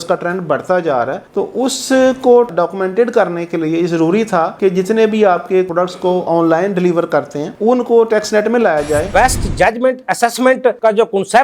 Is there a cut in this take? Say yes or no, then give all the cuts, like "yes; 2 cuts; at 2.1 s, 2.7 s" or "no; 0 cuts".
yes; 3 cuts; at 2.5 s, 5.7 s, 9.1 s